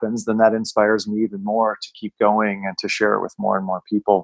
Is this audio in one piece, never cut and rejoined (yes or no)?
yes